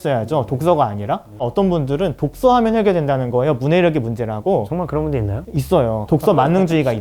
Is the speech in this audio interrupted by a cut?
yes; 2 cuts; at 1.5 s, 6.0 s

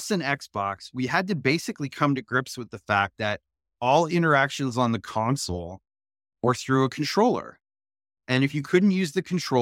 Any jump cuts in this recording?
no; 0 cuts

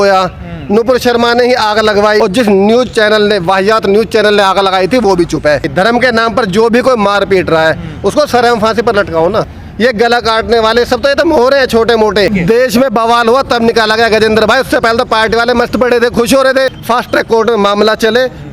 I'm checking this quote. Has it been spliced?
yes; 5 cuts; at 2.2 s, 5.7 s, 9.6 s, 12.3 s, 16.8 s

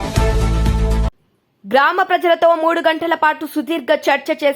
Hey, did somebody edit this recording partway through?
yes; 1 cut; at 1.0 s

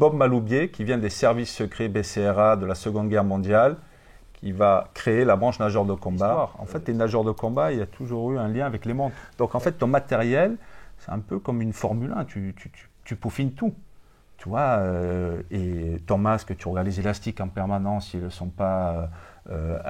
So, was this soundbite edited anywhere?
yes; 2 cuts; at 6.5 s, 9.2 s

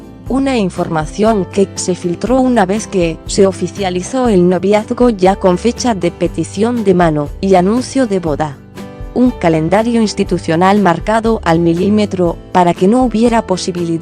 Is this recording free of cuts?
no; 1 cut; at 11.1 s

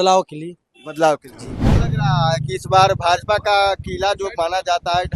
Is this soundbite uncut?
no; 1 cut; at 1.7 s

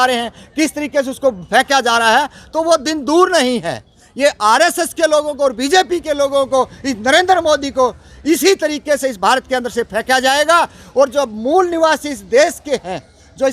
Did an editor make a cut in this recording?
no; 0 cuts

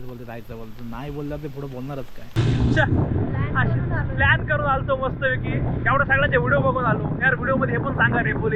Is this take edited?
yes; 1 cut; at 2.4 s

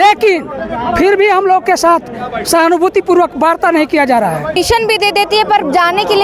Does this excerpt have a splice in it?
yes; 1 cut; at 4.6 s

